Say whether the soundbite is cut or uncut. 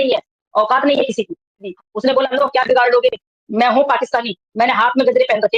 cut